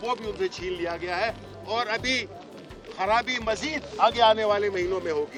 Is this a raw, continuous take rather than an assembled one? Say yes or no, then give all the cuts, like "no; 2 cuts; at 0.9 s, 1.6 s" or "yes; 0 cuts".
yes; 0 cuts